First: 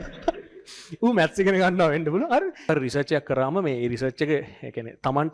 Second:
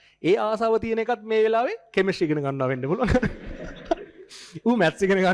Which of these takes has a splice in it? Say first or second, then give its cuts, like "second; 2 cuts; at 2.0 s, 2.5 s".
first; 1 cut; at 2.6 s